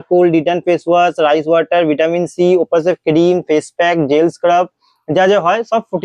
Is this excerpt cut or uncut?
uncut